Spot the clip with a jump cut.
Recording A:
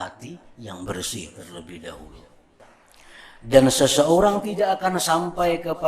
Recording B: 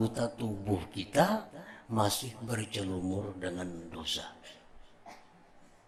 A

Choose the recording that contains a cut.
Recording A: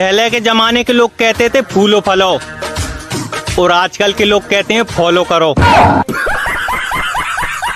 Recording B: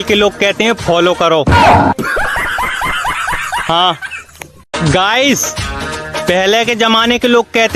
A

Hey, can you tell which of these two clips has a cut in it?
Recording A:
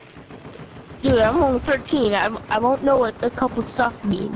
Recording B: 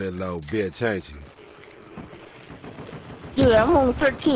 B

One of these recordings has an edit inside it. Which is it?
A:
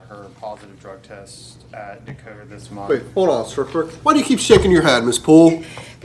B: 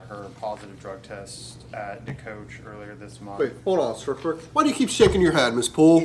A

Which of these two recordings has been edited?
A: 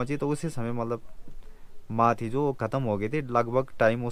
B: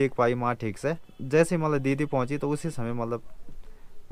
B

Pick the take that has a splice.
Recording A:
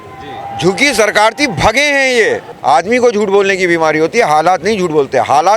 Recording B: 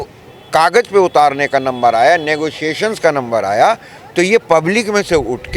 A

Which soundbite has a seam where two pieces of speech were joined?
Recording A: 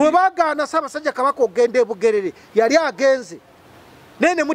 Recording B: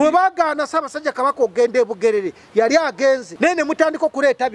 B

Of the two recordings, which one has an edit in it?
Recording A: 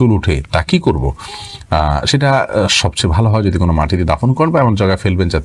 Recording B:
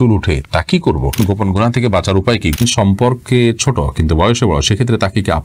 B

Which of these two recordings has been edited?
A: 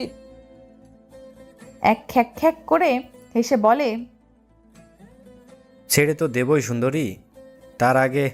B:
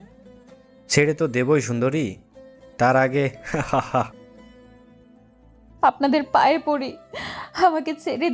B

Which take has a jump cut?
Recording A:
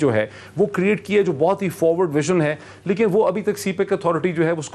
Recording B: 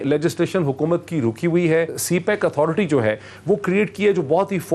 B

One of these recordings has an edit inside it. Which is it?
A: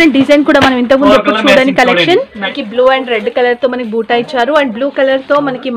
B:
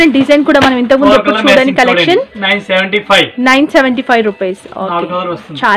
A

